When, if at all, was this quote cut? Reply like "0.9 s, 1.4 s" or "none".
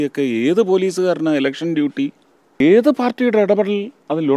2.6 s

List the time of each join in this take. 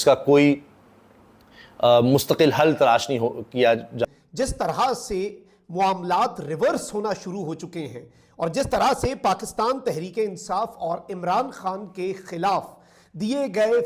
4.0 s

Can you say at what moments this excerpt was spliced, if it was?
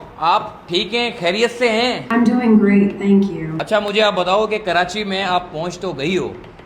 2.0 s, 3.5 s

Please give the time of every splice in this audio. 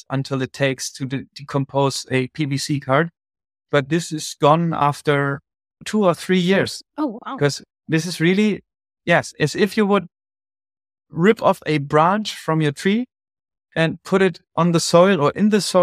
5.8 s, 7.7 s

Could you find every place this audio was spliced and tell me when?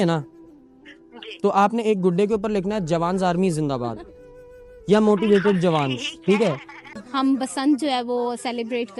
7.0 s

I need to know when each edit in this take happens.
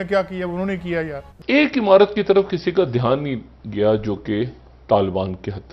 1.2 s

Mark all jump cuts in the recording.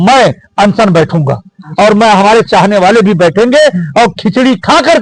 none

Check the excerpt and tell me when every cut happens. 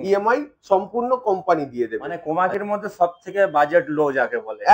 2.1 s

